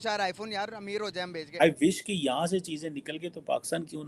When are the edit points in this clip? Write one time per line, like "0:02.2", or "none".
0:01.5